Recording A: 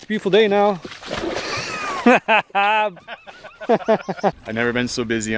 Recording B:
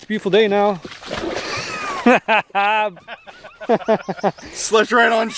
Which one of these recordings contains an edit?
A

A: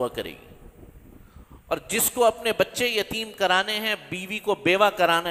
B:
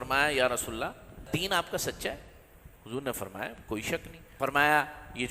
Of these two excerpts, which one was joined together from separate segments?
B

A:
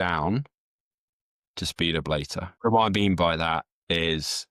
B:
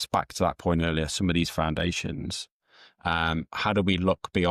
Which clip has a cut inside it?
A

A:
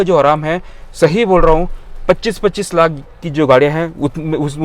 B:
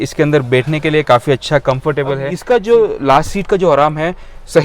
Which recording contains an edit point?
B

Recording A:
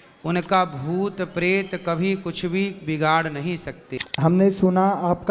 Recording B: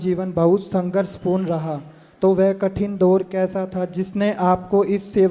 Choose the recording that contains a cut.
A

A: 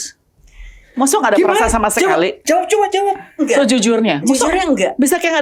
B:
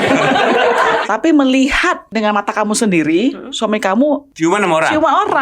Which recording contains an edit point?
B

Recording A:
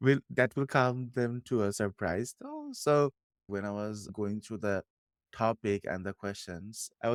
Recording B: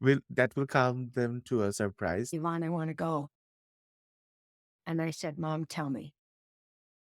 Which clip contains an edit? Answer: B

